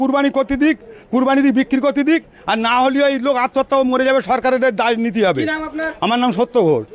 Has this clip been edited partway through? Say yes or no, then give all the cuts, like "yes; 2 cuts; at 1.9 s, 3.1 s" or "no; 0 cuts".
no; 0 cuts